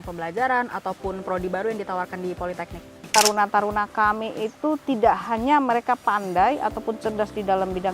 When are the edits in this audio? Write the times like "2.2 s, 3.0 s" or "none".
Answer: 3.0 s